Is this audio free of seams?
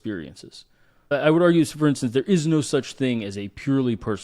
no; 1 cut; at 1.1 s

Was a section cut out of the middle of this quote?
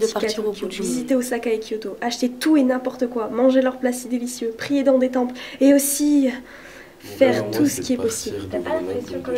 no; 0 cuts

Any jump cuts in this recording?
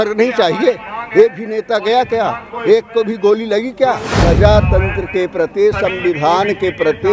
yes; 1 cut; at 4.2 s

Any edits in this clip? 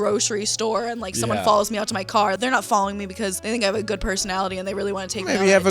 yes; 2 cuts; at 2.4 s, 3.4 s

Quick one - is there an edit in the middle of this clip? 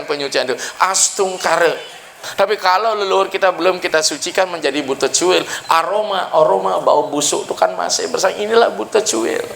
yes; 1 cut; at 2.2 s

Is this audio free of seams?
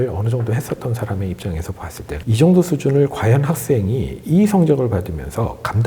no; 1 cut; at 2.1 s

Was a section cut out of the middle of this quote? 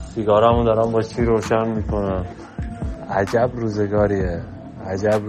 yes; 1 cut; at 2.9 s

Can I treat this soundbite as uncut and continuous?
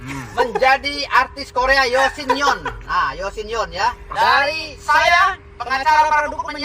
no; 1 cut; at 4.0 s

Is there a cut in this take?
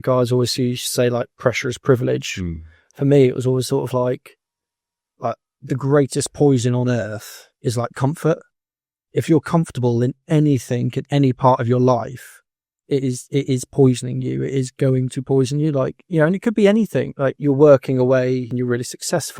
yes; 2 cuts; at 17.4 s, 18.5 s

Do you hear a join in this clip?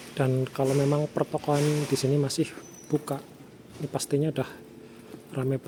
no; 0 cuts

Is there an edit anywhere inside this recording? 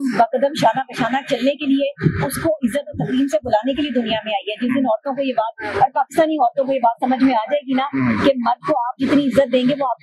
no; 0 cuts

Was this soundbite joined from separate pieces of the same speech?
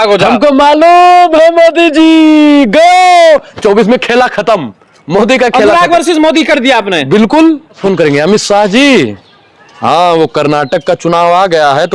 yes; 1 cut; at 7.8 s

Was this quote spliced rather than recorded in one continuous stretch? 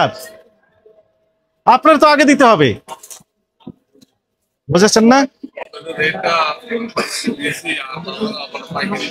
no; 0 cuts

